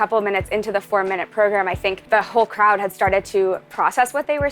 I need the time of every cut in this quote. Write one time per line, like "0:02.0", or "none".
0:02.0